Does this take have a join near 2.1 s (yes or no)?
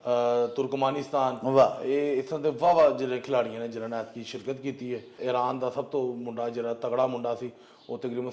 no